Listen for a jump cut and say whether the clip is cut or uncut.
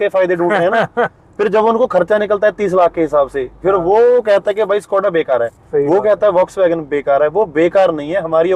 uncut